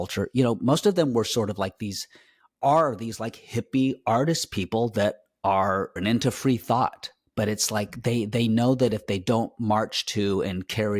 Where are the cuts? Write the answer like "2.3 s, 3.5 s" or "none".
6.0 s